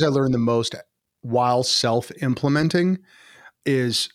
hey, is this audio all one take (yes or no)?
yes